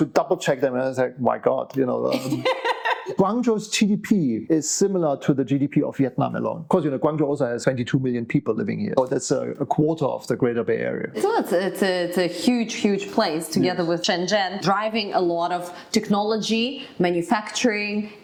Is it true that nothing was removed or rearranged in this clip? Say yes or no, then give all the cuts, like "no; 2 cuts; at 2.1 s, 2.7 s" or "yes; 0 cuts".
yes; 0 cuts